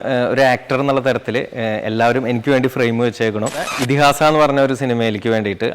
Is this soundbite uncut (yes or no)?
no